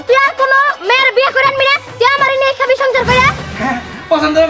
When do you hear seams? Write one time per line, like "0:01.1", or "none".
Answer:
0:03.4

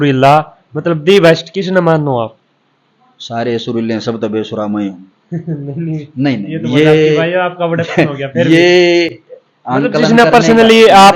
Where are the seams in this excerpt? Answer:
none

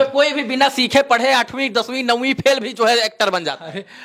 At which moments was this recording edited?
none

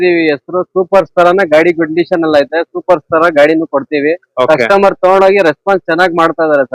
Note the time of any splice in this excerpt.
none

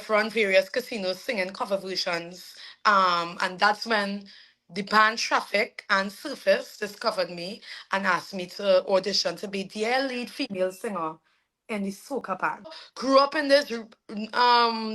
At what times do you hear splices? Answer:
0:12.8

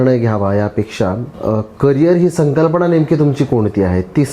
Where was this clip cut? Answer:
0:01.3

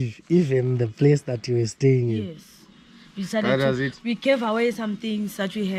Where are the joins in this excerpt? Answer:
none

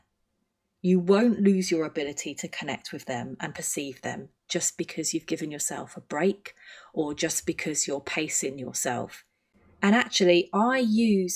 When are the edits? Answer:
0:09.6

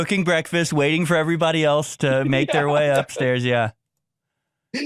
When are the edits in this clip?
none

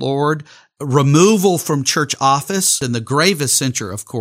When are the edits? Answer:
0:02.8

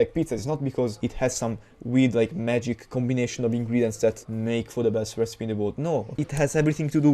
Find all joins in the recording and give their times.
0:01.0
0:04.3
0:06.1

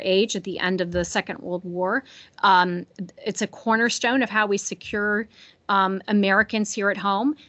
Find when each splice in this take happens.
none

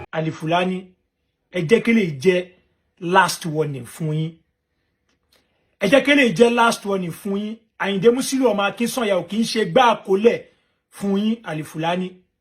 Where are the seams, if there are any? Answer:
0:01.5

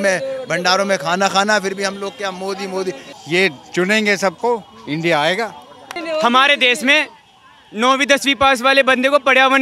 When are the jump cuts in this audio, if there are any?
0:03.1
0:06.0

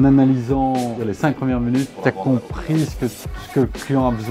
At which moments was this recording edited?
0:01.1
0:01.9

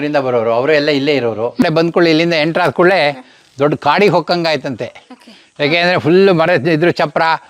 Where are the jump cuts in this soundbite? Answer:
0:01.6

